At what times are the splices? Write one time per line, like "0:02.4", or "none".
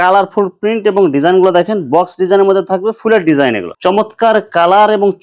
0:03.7